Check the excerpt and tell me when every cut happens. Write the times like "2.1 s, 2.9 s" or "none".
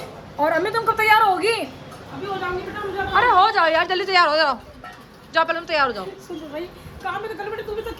none